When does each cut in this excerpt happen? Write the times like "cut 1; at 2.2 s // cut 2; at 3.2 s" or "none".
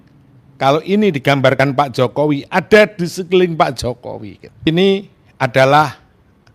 cut 1; at 4.7 s